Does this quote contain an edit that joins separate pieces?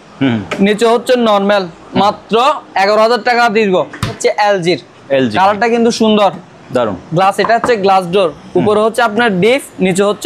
yes; 1 cut; at 4.2 s

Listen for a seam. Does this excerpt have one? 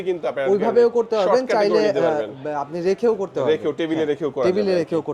no; 0 cuts

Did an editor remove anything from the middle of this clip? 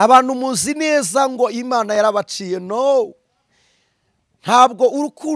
no; 0 cuts

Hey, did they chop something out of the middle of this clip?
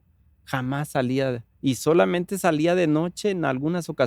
no; 0 cuts

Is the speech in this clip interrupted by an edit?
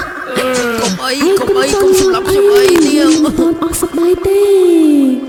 no; 0 cuts

